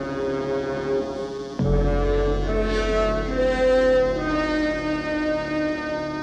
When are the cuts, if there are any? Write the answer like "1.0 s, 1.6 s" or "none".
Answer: none